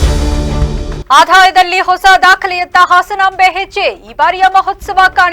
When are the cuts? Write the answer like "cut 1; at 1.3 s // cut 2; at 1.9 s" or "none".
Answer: cut 1; at 1.0 s